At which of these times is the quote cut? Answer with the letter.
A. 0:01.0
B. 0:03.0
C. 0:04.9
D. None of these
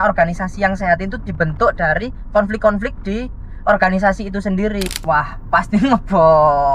C